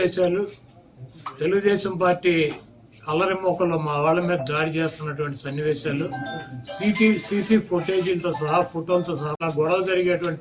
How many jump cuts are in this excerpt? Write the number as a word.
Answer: one